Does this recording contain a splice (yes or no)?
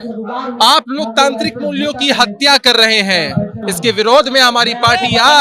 no